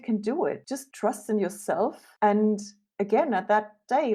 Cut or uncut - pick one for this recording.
uncut